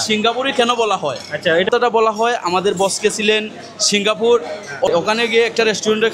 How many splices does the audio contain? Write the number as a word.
two